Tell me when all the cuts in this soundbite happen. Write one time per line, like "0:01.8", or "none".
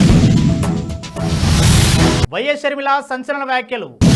none